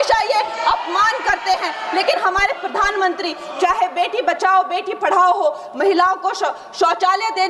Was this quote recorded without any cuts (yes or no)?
yes